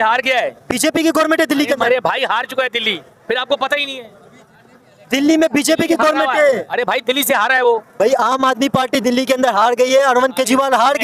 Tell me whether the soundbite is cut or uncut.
uncut